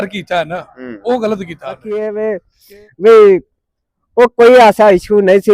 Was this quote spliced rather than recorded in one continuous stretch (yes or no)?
yes